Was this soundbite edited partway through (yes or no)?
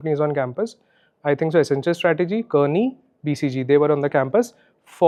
no